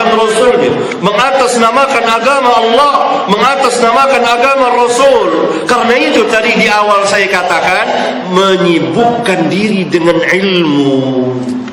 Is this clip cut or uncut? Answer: uncut